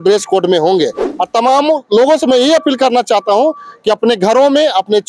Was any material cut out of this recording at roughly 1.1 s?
yes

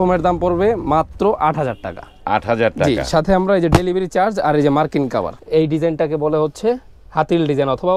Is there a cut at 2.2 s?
no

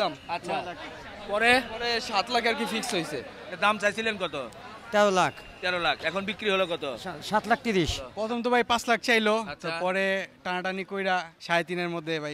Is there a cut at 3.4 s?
yes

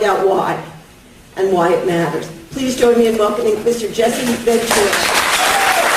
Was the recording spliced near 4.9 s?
yes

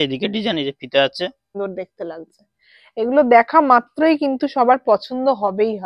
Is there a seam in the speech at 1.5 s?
yes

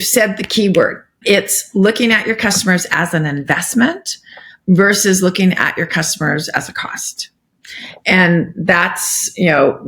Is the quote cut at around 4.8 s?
no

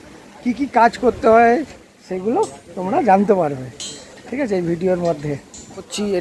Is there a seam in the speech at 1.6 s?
no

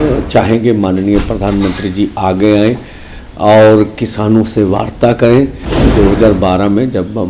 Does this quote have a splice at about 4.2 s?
no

